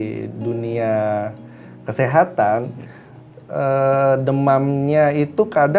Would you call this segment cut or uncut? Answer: uncut